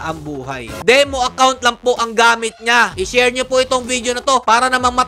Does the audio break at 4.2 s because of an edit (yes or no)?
no